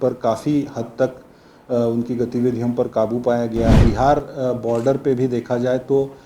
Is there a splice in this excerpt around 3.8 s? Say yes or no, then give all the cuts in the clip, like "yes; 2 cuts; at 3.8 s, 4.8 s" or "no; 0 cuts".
yes; 1 cut; at 3.8 s